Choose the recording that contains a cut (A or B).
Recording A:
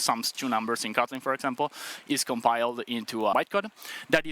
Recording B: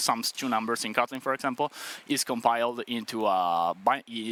A